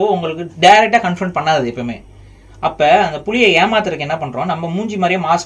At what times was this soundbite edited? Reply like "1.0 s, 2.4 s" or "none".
none